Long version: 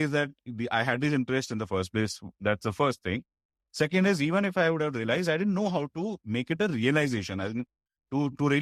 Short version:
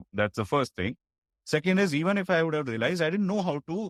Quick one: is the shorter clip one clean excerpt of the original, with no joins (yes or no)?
yes